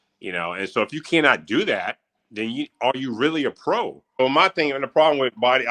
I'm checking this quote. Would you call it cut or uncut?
cut